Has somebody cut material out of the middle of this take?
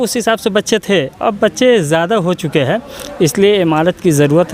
no; 0 cuts

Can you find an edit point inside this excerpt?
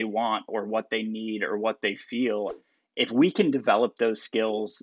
yes; 1 cut; at 2.6 s

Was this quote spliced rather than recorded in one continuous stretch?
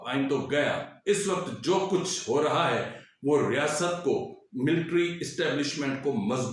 yes; 1 cut; at 0.9 s

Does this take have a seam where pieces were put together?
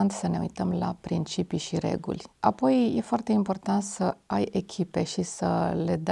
yes; 1 cut; at 2.3 s

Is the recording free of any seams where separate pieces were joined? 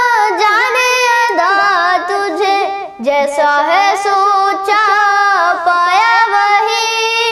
yes; 0 cuts

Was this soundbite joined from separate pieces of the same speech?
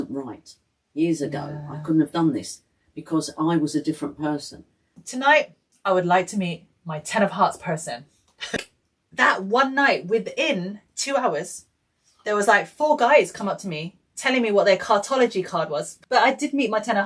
yes; 3 cuts; at 5.0 s, 8.6 s, 15.9 s

